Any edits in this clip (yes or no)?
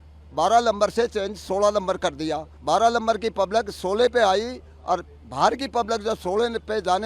yes